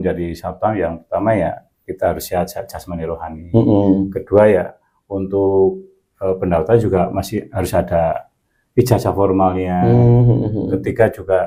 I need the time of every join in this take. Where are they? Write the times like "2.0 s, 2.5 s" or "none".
none